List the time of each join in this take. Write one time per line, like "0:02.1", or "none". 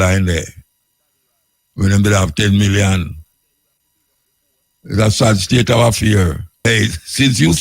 0:06.5